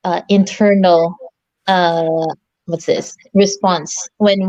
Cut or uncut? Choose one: uncut